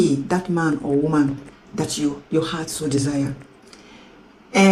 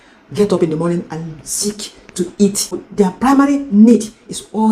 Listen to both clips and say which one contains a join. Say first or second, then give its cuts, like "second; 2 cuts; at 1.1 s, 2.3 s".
second; 1 cut; at 3.1 s